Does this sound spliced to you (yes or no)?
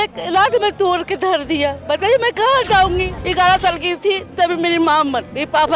yes